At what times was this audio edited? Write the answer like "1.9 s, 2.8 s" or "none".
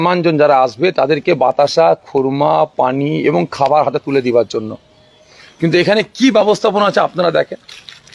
none